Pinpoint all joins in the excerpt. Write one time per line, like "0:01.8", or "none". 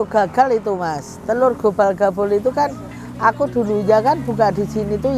none